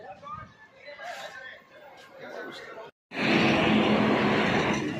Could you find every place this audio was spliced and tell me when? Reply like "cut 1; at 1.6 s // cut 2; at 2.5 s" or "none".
cut 1; at 2.9 s